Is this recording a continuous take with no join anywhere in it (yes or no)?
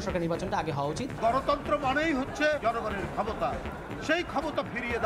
no